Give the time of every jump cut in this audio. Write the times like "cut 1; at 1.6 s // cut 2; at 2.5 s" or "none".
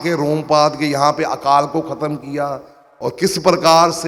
none